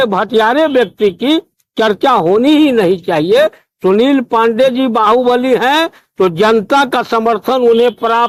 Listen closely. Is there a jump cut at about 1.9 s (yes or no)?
no